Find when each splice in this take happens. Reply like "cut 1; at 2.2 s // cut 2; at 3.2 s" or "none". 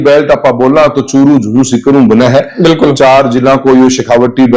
none